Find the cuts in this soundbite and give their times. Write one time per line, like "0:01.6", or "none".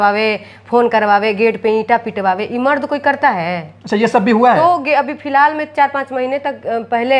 none